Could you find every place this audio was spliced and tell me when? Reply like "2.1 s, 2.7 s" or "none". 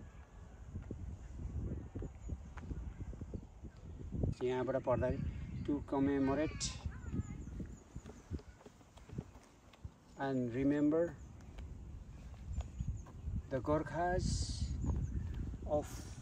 4.3 s